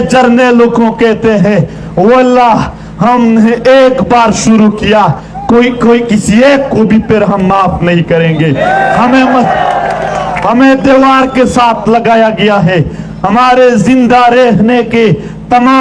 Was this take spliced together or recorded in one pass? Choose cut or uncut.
uncut